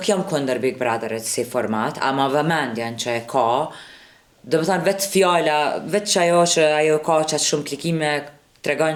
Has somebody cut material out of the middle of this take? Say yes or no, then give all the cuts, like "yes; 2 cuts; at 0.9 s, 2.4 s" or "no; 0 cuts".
no; 0 cuts